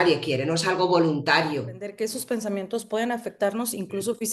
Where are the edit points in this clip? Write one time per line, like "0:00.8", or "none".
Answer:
0:01.9

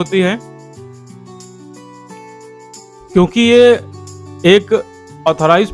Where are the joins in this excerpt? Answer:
none

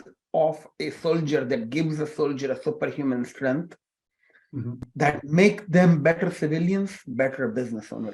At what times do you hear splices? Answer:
0:07.1

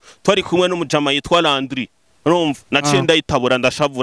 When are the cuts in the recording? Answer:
none

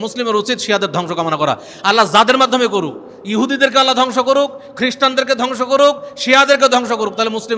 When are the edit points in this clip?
none

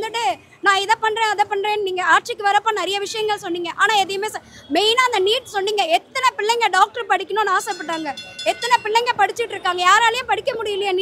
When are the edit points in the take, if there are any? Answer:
none

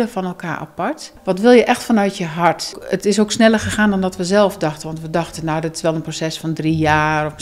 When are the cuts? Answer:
0:01.1
0:02.8

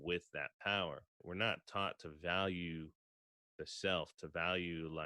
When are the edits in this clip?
0:01.2

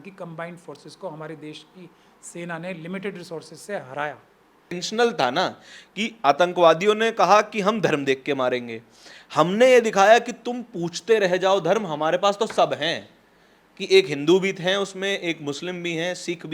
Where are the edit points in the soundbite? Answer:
0:04.8

